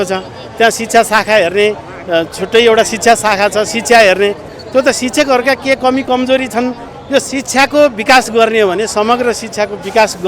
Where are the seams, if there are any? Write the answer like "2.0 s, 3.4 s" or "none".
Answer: 6.9 s

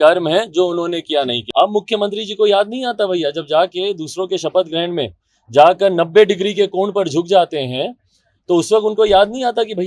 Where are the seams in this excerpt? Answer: 1.4 s

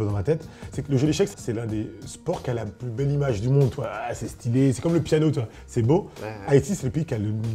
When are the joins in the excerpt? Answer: 1.3 s

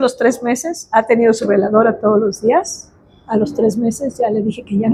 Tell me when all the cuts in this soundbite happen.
none

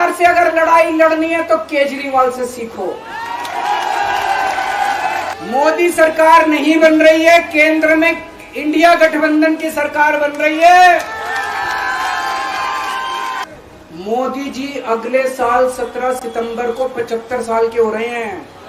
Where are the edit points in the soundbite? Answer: 5.3 s, 13.4 s

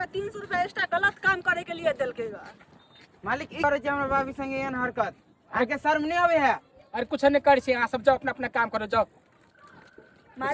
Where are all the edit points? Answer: 3.6 s

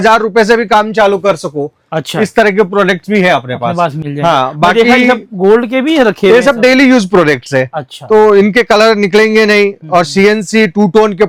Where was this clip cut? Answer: none

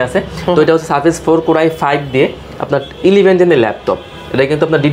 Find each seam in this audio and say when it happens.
none

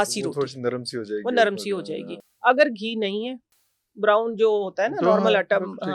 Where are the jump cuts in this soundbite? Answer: none

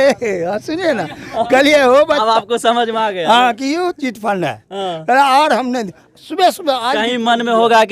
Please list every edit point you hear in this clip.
1.9 s

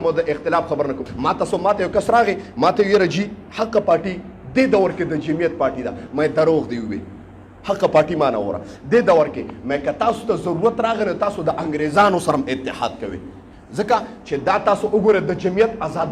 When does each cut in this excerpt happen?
1.1 s

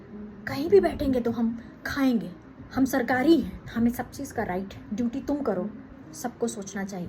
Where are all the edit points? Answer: 2.6 s, 3.6 s, 4.8 s, 6.0 s

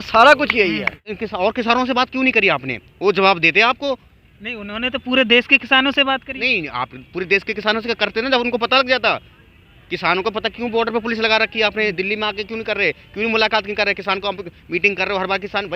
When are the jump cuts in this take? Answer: 1.0 s

